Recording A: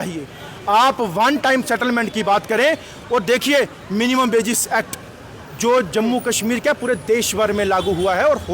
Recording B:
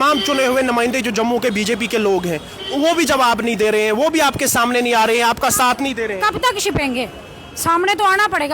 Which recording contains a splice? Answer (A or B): A